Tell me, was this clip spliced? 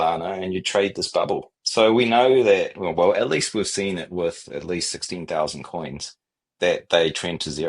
yes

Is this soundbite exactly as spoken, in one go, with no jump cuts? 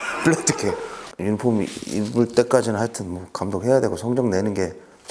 no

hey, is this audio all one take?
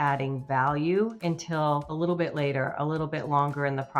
no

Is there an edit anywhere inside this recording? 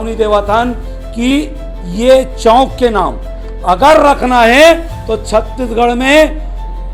no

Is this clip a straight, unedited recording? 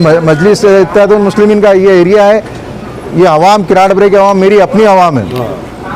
yes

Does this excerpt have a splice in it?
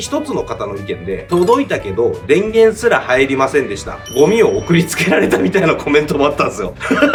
no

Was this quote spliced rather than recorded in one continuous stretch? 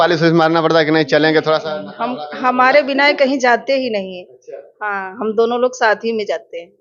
no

